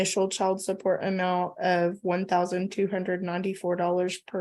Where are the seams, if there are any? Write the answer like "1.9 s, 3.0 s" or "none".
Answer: none